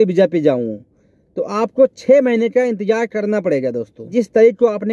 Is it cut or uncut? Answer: cut